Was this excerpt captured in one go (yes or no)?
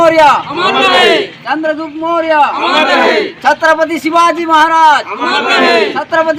yes